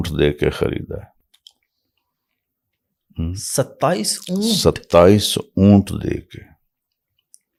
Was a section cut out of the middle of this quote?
no; 0 cuts

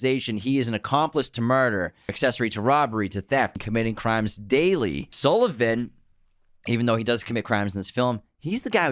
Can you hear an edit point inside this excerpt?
yes; 3 cuts; at 2.1 s, 3.6 s, 5.1 s

